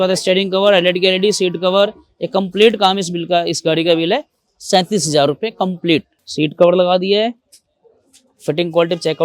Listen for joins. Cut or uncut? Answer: cut